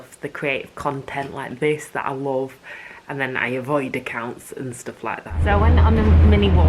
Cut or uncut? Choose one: cut